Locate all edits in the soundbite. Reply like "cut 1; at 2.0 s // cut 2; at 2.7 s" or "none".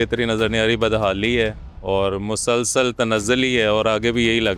none